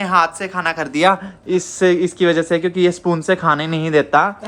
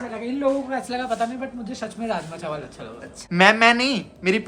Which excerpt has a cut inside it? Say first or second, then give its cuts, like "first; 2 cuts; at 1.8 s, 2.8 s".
second; 1 cut; at 3.2 s